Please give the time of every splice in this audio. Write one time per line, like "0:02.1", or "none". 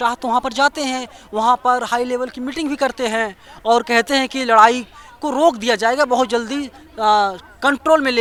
none